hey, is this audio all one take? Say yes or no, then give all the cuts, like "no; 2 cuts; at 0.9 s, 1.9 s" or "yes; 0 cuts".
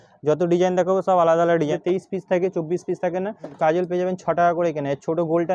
no; 2 cuts; at 1.8 s, 3.5 s